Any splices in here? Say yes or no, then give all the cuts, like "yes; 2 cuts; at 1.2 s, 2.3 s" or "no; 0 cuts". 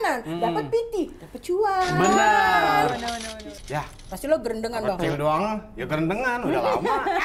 yes; 1 cut; at 3.3 s